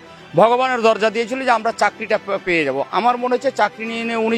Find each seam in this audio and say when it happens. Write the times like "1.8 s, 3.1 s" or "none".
none